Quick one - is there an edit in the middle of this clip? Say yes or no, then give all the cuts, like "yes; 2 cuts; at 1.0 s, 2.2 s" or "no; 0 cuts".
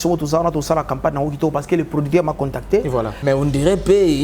yes; 1 cut; at 3.1 s